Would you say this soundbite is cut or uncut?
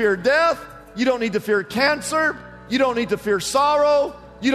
uncut